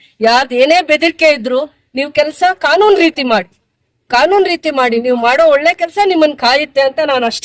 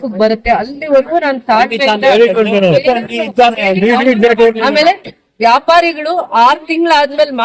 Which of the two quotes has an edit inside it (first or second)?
second